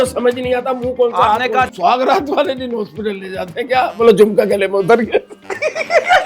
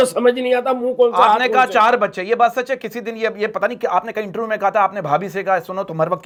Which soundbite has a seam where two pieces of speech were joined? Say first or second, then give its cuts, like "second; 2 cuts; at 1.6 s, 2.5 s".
first; 1 cut; at 1.7 s